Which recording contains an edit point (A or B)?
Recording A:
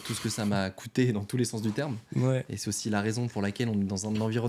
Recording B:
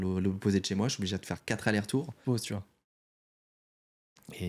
B